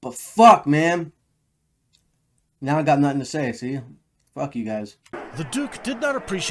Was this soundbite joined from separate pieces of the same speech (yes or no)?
yes